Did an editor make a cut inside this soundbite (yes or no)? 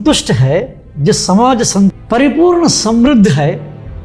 no